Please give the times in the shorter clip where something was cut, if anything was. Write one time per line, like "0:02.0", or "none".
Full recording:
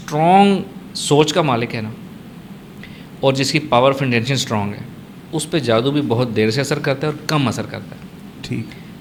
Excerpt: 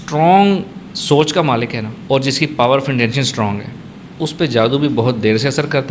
0:01.9